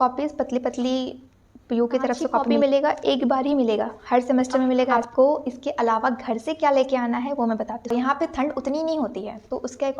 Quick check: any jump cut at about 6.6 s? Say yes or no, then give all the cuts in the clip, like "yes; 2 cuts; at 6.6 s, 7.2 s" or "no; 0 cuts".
no; 3 cuts; at 2.6 s, 5.0 s, 7.9 s